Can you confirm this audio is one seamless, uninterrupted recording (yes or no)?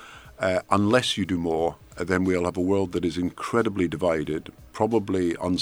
yes